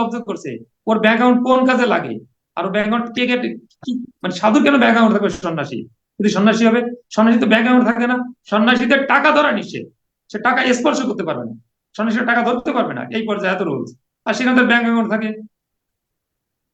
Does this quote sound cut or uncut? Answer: cut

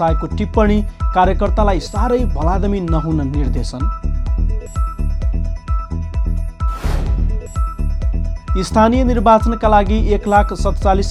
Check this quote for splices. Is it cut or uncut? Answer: uncut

